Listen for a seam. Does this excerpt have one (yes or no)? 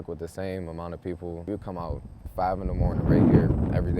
yes